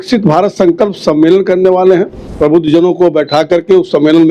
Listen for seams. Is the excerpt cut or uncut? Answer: cut